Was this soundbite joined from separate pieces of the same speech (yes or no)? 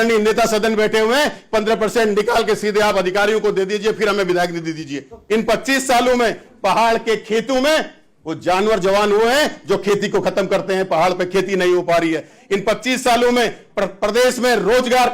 yes